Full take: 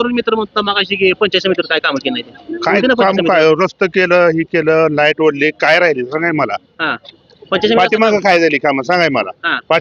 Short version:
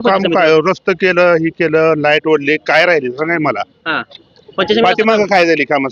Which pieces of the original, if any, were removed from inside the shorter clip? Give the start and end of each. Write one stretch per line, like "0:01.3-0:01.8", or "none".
none